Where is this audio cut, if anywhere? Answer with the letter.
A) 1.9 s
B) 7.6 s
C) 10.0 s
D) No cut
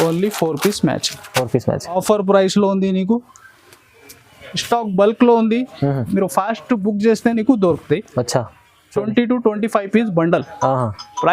A